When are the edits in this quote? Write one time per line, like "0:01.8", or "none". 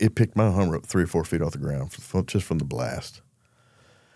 none